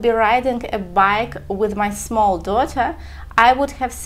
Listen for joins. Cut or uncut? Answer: uncut